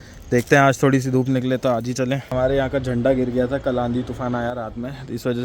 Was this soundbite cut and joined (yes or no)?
yes